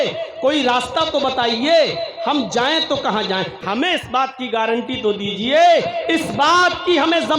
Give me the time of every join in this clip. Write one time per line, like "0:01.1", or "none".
0:03.6